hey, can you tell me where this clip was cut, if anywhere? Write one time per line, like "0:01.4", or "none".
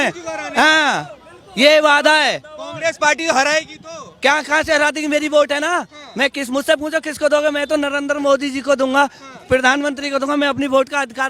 none